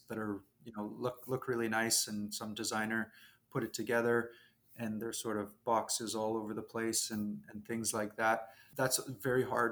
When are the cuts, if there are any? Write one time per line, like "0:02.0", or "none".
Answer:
0:08.6